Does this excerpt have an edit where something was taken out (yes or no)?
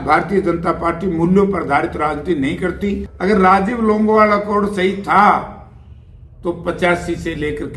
yes